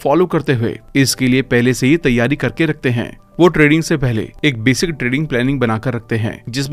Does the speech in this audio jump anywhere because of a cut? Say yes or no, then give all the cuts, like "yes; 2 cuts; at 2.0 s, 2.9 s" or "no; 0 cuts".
no; 0 cuts